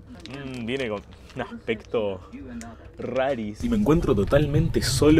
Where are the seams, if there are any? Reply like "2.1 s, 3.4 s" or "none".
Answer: 3.5 s